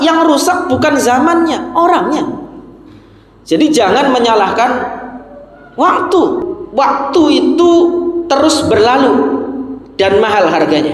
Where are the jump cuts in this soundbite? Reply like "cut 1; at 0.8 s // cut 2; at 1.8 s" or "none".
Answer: cut 1; at 6.6 s